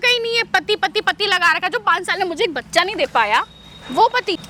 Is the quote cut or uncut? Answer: uncut